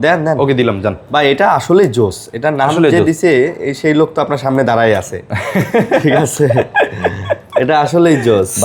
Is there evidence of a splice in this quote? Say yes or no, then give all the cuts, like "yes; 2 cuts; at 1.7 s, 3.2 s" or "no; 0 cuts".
no; 0 cuts